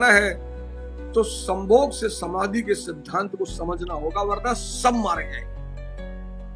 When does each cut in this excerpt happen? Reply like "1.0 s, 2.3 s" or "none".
5.2 s

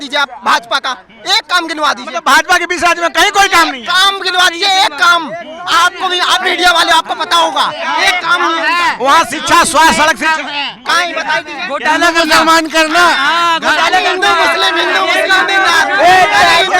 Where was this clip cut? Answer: none

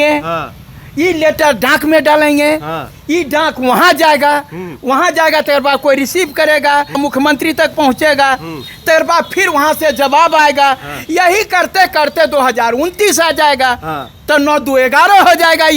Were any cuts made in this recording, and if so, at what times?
7.0 s

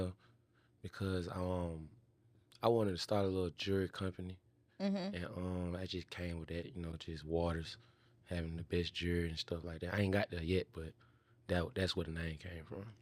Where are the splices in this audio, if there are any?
none

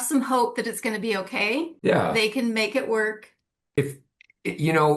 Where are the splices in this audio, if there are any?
1.7 s, 3.8 s

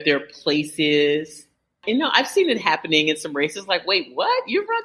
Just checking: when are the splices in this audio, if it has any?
1.7 s

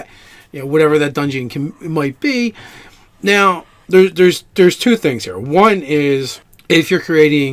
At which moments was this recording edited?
1.1 s

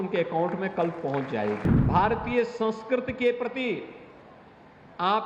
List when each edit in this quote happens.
1.7 s

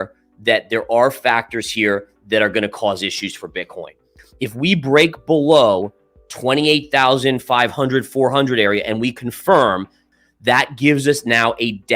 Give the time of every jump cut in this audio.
4.1 s

